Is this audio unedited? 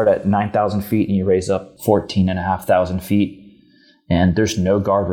no; 1 cut; at 1.7 s

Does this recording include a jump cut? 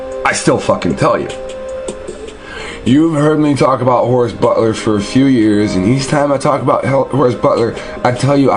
yes; 1 cut; at 5.5 s

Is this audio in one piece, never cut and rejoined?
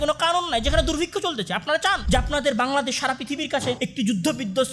no; 2 cuts; at 2.0 s, 3.8 s

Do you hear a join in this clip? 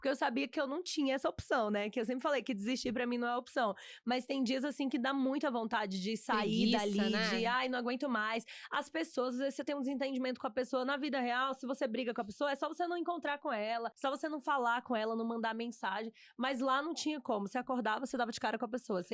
no; 0 cuts

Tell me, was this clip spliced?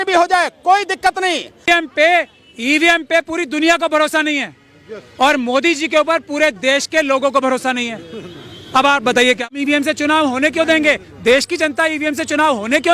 yes; 2 cuts; at 1.7 s, 9.5 s

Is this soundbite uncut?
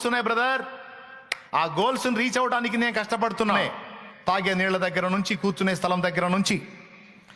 no; 1 cut; at 3.6 s

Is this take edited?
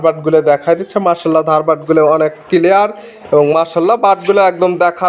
no; 0 cuts

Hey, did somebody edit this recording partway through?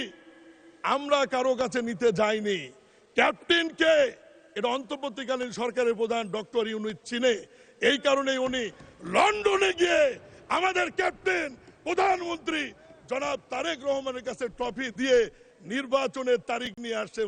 no; 0 cuts

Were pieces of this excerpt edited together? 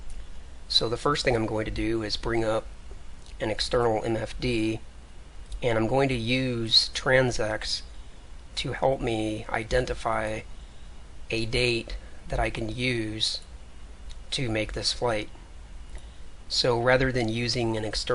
no; 0 cuts

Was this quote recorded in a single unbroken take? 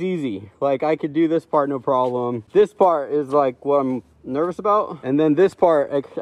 no; 2 cuts; at 2.4 s, 5.0 s

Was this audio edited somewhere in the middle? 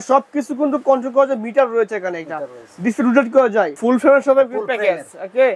yes; 1 cut; at 3.8 s

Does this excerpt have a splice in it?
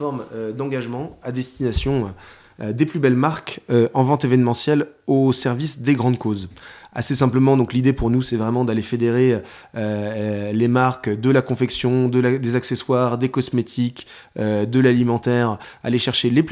no; 0 cuts

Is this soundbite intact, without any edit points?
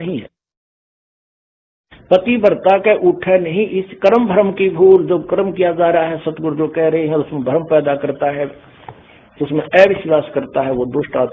yes; 0 cuts

